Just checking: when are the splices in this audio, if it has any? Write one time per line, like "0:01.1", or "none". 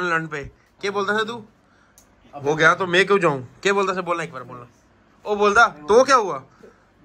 none